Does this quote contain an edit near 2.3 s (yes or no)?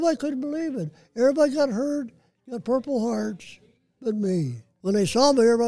no